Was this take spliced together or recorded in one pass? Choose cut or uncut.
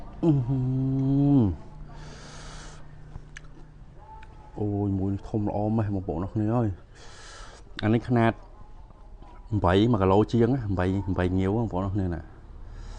uncut